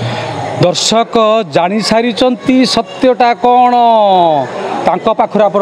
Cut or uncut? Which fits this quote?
uncut